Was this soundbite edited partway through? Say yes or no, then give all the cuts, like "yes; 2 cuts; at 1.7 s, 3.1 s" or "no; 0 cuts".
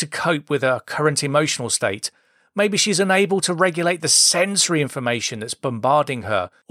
no; 0 cuts